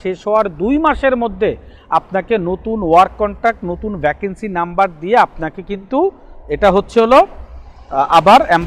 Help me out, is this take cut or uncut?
uncut